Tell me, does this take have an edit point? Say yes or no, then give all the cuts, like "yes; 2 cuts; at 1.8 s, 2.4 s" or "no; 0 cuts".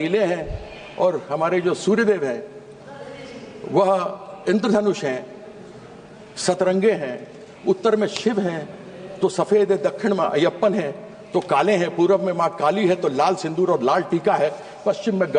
no; 0 cuts